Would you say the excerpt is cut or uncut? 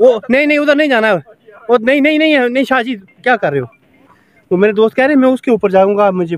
uncut